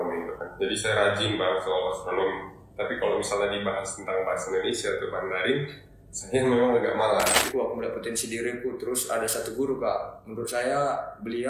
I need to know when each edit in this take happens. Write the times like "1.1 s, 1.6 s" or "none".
7.5 s